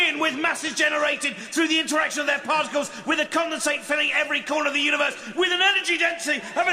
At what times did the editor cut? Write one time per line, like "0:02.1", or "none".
0:03.3